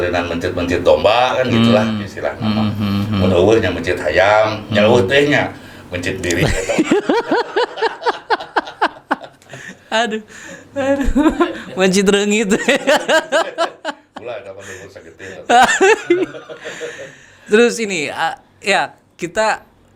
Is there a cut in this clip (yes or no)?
no